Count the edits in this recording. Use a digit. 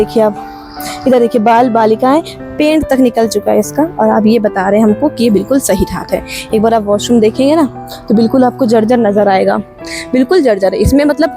0